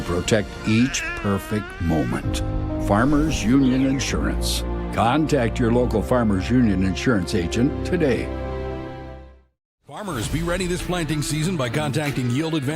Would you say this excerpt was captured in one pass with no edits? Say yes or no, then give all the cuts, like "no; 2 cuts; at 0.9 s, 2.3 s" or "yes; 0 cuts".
no; 1 cut; at 11.3 s